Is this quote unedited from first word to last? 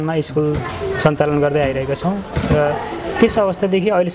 yes; 0 cuts

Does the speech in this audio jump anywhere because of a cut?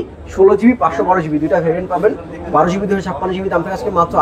no; 0 cuts

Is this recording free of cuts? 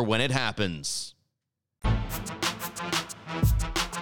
yes; 0 cuts

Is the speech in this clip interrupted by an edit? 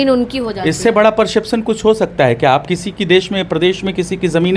no; 0 cuts

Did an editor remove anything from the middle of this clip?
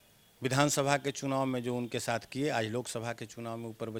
no; 0 cuts

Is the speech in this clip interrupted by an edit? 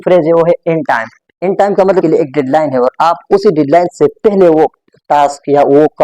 yes; 1 cut; at 2.0 s

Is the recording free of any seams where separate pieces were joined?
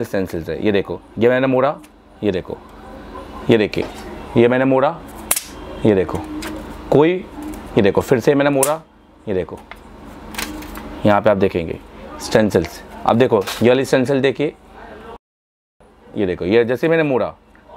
yes; 0 cuts

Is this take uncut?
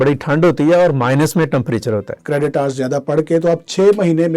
no; 1 cut; at 2.2 s

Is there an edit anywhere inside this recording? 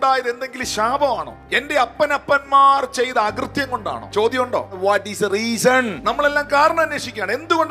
yes; 2 cuts; at 1.4 s, 4.0 s

